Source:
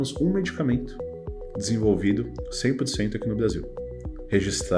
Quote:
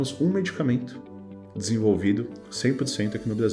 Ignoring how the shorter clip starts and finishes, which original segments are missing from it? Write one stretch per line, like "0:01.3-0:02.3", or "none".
none